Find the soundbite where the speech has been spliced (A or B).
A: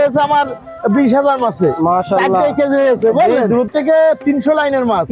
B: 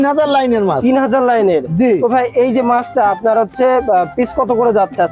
A